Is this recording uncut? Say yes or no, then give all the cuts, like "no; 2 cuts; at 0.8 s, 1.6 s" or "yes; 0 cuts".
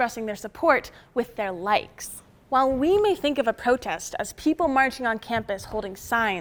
yes; 0 cuts